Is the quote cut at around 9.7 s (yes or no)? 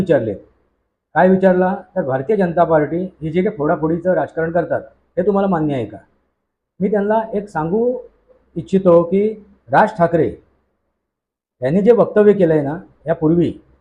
no